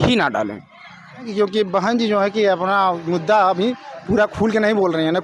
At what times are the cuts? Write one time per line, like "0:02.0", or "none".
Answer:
0:01.3